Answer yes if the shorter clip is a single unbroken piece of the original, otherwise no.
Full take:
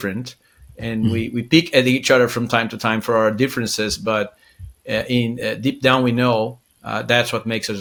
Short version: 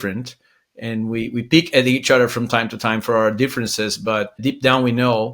no